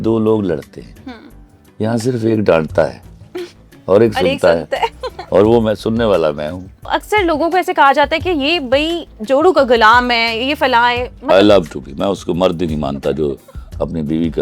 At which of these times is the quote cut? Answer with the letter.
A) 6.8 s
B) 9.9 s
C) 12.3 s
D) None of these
A